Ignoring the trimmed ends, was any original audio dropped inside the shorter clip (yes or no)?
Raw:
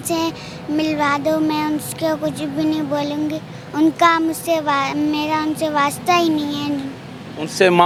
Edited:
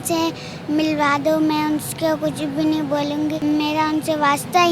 yes